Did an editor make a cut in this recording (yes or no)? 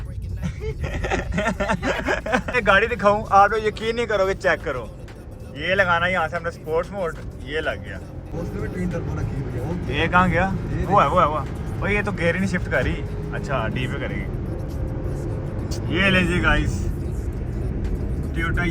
yes